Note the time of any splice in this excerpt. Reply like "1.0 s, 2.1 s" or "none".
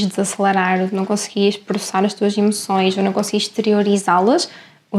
none